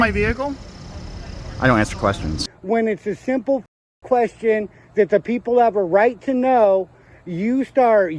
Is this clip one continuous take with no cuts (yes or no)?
no